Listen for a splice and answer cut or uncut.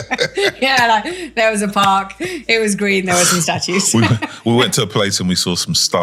uncut